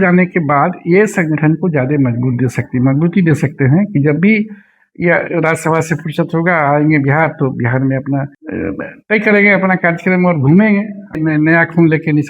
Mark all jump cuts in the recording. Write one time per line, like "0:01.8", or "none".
0:08.4
0:11.2